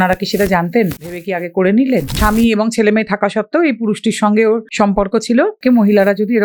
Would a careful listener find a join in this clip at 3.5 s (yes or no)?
no